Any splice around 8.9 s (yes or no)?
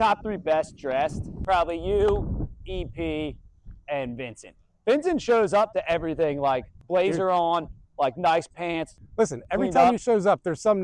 yes